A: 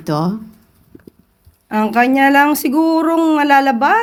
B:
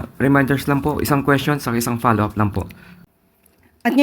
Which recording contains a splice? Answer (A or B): B